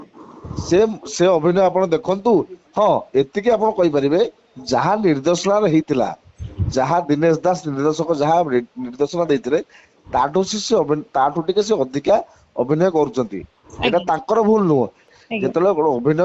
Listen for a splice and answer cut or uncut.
cut